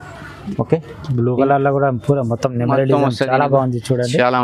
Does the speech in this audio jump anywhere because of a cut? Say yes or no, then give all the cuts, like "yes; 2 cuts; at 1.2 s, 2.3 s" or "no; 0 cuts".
no; 0 cuts